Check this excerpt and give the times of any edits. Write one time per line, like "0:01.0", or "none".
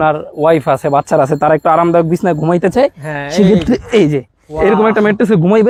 none